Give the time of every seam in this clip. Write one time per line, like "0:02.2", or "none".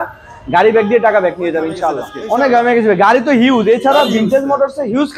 0:02.1